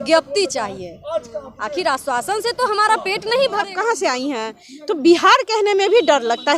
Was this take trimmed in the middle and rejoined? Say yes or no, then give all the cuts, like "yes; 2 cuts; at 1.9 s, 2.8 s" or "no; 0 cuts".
yes; 1 cut; at 3.7 s